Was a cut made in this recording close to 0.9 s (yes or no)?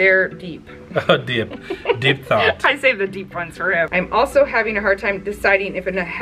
no